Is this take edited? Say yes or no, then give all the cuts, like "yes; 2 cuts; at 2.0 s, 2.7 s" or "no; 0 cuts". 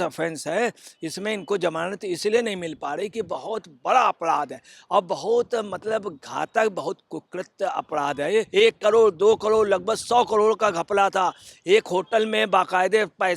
yes; 1 cut; at 8.5 s